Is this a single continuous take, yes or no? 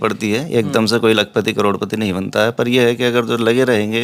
yes